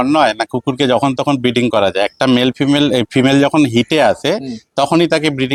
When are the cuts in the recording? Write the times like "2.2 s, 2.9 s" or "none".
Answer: none